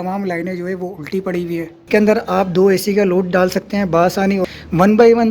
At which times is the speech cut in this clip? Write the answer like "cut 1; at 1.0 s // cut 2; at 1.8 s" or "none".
cut 1; at 1.8 s // cut 2; at 4.4 s